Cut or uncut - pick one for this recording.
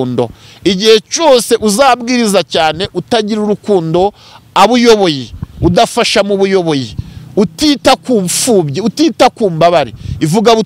uncut